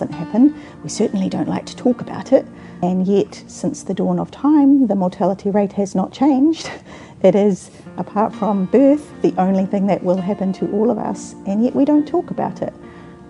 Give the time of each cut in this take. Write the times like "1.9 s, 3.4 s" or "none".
2.6 s